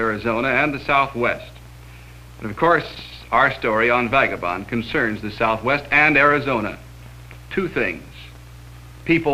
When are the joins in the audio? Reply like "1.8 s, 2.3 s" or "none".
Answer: 2.5 s